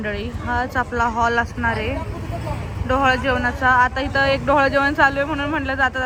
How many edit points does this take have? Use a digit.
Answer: 0